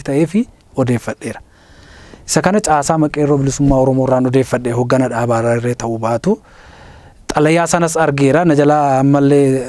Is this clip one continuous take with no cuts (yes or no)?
yes